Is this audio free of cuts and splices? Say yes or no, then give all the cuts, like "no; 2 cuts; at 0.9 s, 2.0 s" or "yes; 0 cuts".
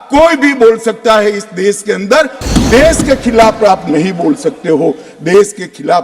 no; 1 cut; at 2.4 s